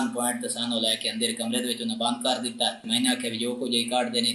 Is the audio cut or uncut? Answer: cut